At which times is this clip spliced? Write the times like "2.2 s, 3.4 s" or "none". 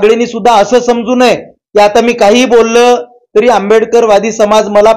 none

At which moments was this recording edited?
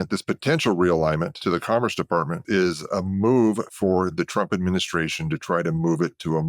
1.3 s, 2.4 s

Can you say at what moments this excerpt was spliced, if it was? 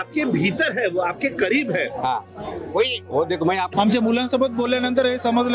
3.7 s

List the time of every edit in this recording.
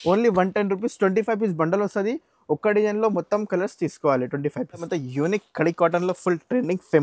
4.7 s

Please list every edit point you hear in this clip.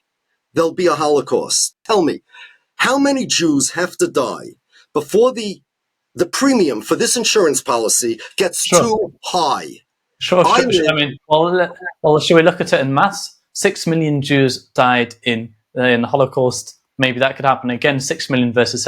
1.8 s

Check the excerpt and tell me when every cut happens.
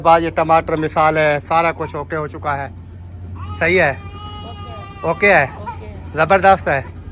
none

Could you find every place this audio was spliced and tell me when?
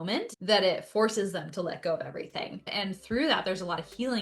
2.7 s

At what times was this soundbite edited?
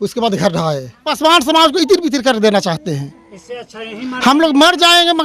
1.1 s

